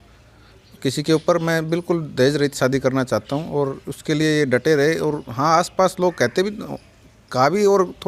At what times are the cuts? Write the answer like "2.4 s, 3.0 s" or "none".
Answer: none